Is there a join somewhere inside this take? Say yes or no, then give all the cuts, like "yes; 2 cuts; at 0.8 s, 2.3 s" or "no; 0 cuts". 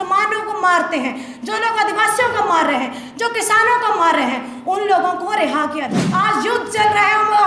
yes; 1 cut; at 5.9 s